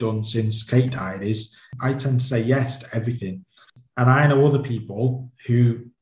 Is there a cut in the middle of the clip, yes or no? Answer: yes